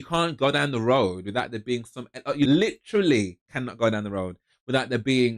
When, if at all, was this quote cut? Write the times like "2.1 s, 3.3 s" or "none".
2.5 s